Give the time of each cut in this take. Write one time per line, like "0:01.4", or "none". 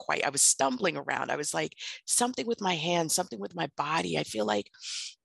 none